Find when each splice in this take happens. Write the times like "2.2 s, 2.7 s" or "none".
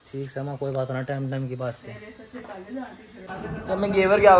3.3 s